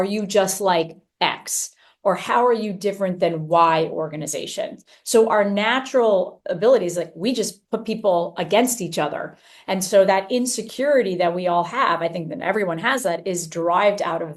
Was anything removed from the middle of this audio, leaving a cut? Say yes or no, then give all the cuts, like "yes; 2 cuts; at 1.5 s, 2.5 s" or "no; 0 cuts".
no; 0 cuts